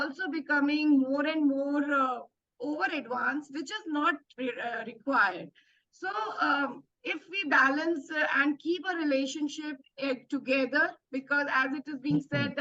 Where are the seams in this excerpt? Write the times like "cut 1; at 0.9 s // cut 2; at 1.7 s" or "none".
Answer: none